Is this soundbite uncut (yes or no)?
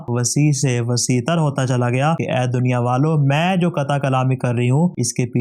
no